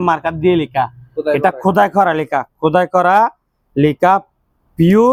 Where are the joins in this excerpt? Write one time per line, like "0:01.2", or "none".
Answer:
none

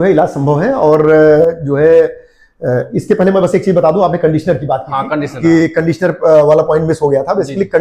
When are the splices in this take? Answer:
none

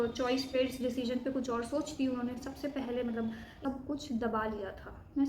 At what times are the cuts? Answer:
0:03.6

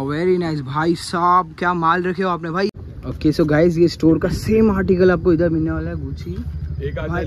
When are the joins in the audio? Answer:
0:02.7

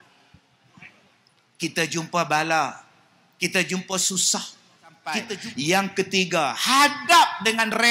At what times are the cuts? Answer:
0:05.3

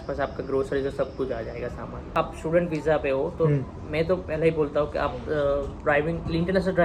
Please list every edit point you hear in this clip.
0:02.1

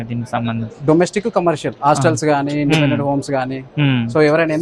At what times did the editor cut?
none

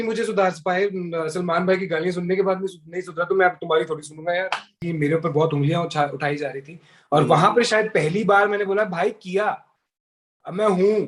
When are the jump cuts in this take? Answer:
0:04.8

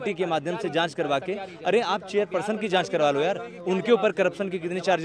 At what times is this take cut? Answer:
none

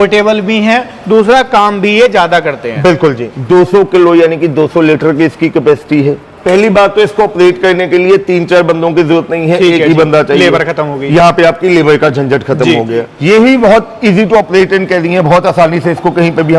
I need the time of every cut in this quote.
0:03.3
0:06.3
0:13.1

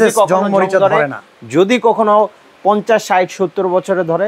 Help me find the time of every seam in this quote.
none

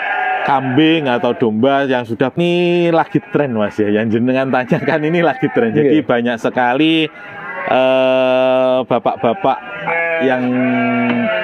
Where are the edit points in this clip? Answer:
0:02.3

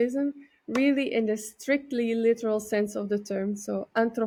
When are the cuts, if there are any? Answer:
none

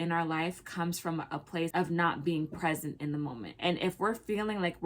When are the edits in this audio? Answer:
0:03.4

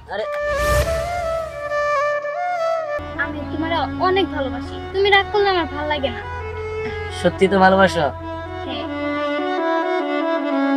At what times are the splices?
0:03.0

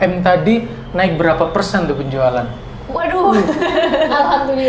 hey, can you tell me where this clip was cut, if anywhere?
none

